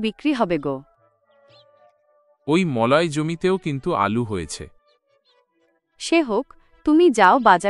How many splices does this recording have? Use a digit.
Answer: 2